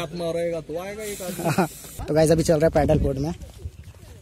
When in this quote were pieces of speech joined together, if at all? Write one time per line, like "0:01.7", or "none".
0:02.0